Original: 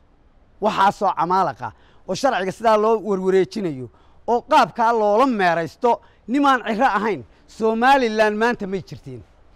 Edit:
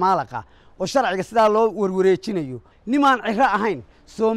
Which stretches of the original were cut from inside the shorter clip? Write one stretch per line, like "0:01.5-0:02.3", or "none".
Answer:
0:04.0-0:06.1